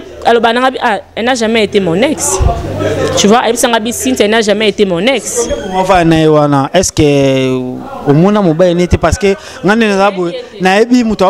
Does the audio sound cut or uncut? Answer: uncut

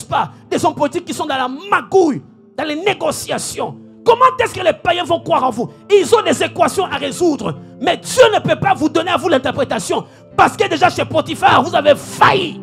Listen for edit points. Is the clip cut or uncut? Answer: uncut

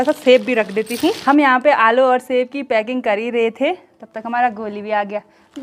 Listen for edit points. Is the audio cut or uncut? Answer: uncut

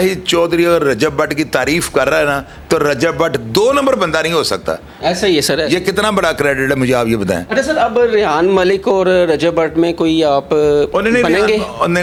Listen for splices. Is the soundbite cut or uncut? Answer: uncut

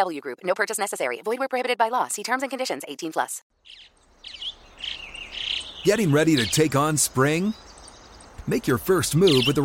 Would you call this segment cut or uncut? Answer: cut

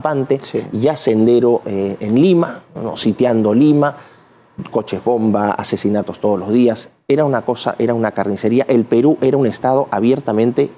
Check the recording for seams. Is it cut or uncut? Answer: uncut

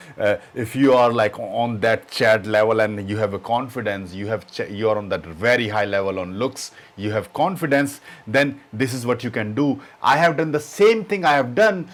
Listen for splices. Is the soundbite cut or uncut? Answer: uncut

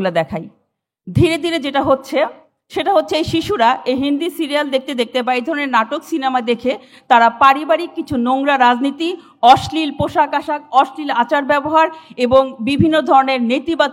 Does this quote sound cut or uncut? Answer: uncut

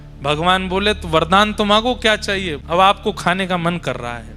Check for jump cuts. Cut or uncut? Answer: cut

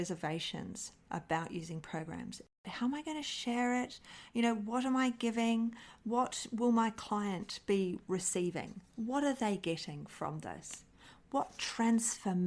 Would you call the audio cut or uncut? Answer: cut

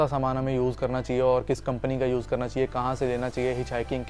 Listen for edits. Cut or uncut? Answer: uncut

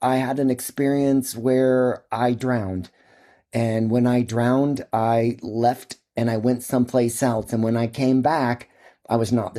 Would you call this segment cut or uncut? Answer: uncut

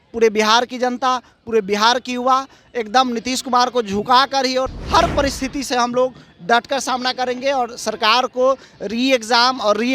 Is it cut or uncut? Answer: cut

